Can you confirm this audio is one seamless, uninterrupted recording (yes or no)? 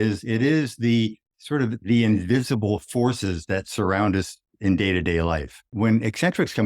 no